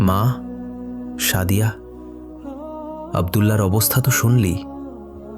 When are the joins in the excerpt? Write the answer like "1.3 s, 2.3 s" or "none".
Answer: 1.7 s, 3.1 s